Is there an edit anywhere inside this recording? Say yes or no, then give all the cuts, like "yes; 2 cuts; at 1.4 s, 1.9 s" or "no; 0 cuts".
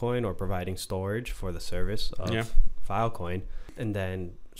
yes; 1 cut; at 3.6 s